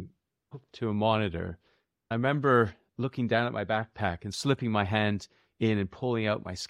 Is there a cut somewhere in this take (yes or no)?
yes